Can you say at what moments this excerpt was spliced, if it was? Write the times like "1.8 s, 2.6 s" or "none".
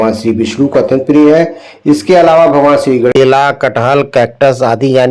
3.1 s